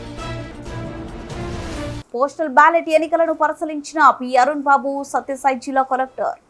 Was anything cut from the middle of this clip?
no; 0 cuts

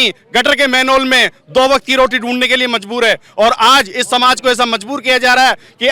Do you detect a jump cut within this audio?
no; 0 cuts

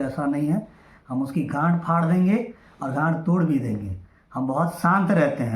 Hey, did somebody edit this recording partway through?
no; 0 cuts

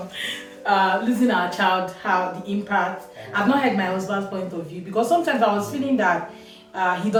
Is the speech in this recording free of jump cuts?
yes; 0 cuts

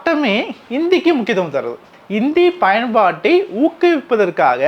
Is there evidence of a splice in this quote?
yes; 1 cut; at 1.9 s

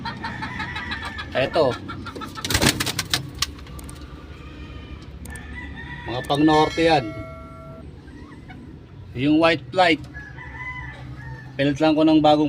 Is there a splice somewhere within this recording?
no; 0 cuts

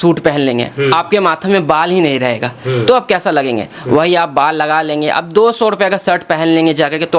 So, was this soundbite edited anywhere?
no; 0 cuts

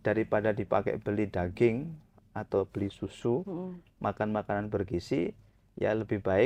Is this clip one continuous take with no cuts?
yes; 0 cuts

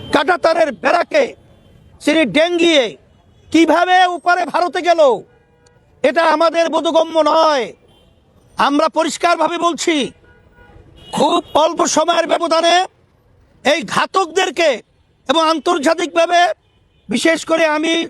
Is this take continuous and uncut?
yes; 0 cuts

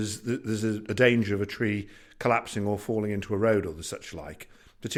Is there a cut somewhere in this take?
no; 0 cuts

